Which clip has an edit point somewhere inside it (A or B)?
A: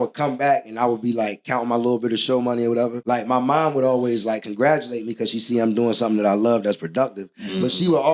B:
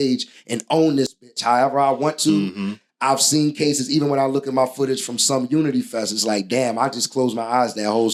A